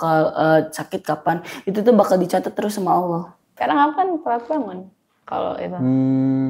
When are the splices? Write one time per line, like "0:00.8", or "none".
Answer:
0:03.4